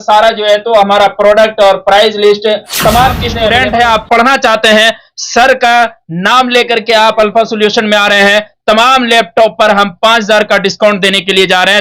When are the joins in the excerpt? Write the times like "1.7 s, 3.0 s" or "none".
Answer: 3.3 s